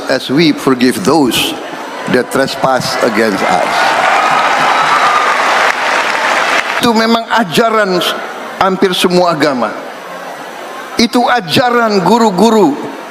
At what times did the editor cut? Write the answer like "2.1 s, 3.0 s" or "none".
6.8 s